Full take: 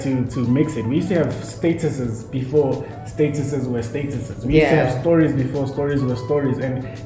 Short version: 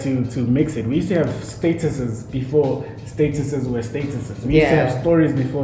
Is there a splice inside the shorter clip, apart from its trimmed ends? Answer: no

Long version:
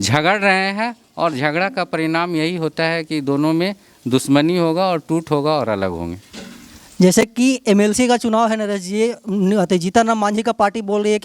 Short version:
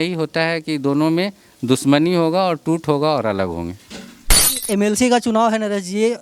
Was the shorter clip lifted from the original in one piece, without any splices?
no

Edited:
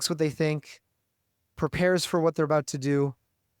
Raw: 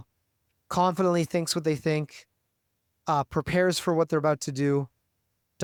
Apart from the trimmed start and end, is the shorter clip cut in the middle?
yes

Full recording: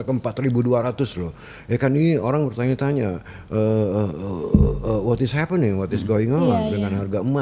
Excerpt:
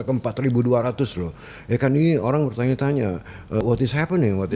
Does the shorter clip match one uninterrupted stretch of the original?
no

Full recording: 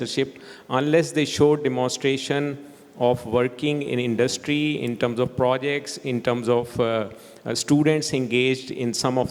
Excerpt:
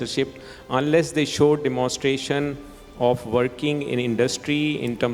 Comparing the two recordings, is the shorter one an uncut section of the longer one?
yes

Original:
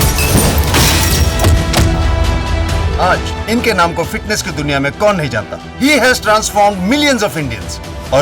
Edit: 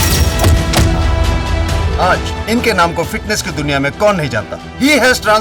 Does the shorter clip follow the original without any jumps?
yes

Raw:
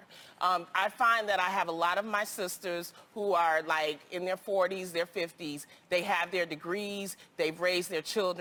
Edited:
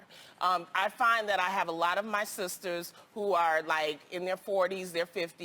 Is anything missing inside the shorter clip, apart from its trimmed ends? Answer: no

